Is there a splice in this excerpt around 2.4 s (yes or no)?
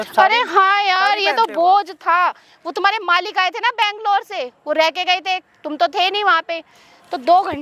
no